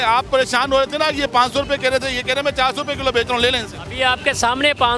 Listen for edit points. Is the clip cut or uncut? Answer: uncut